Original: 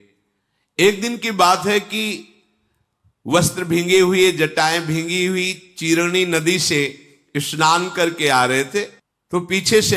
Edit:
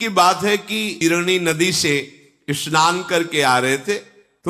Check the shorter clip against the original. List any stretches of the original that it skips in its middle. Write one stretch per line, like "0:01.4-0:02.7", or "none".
0:02.2-0:05.8